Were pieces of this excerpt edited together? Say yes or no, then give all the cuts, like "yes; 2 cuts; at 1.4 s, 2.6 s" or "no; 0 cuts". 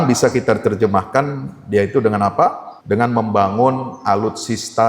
yes; 1 cut; at 2.7 s